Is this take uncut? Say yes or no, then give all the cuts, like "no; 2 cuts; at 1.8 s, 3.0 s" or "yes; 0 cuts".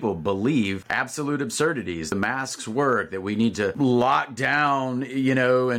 no; 3 cuts; at 0.9 s, 2.1 s, 3.7 s